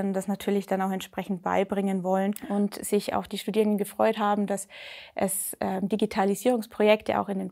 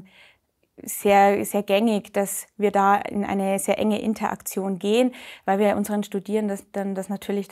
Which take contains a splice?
first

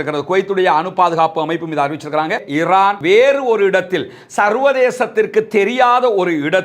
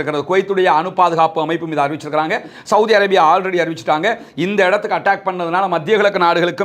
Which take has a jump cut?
first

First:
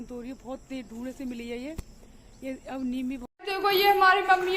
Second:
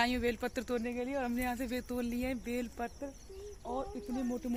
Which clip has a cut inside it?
first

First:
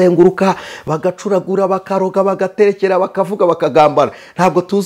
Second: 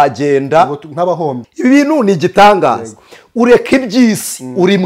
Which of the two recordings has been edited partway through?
second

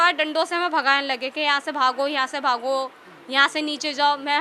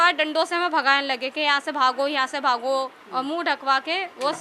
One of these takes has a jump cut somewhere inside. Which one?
second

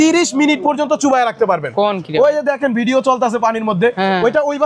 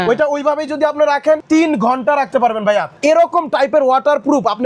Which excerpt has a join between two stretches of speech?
second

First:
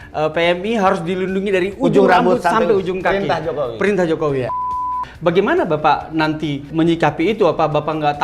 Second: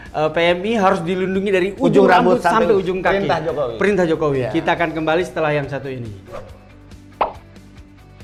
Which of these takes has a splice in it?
first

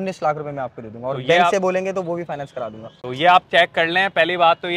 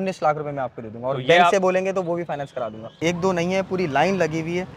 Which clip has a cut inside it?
second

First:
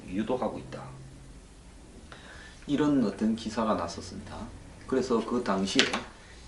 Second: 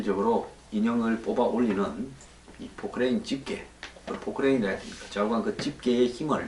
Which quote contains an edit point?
first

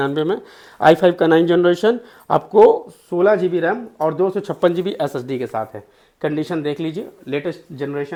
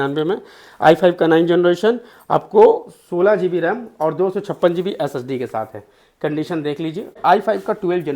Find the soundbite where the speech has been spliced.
second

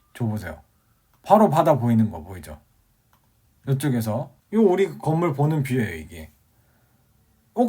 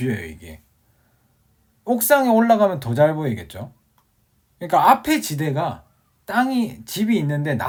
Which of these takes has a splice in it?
first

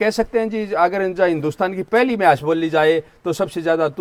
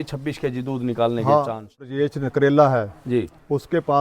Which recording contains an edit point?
second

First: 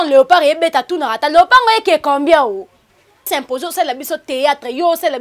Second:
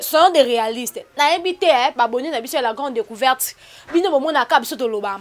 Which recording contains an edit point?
first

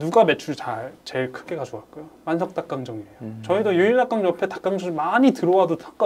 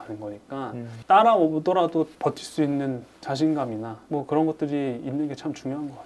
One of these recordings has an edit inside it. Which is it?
second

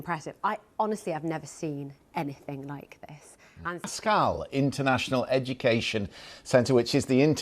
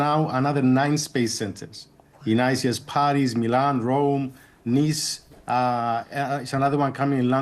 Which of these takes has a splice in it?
first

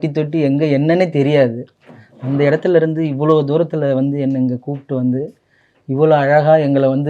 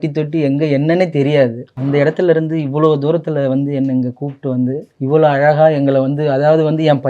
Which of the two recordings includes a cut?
second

